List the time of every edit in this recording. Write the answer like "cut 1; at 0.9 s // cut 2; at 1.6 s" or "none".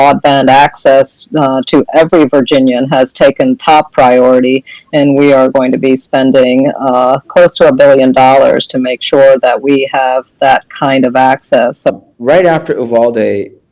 cut 1; at 11.9 s

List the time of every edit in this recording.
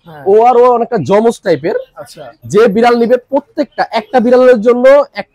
cut 1; at 2.3 s

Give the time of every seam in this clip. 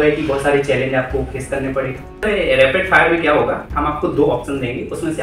cut 1; at 2.2 s

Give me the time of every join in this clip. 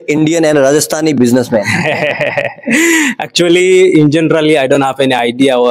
none

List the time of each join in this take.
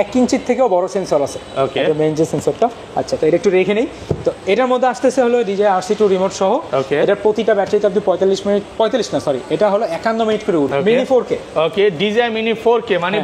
cut 1; at 10.7 s

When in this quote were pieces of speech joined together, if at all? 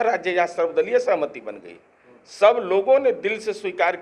none

